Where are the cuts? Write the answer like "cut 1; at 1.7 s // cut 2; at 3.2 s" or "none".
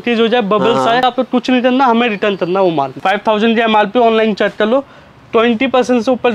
cut 1; at 1.0 s // cut 2; at 2.9 s